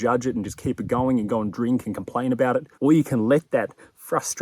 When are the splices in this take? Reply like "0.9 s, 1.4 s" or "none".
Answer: 2.7 s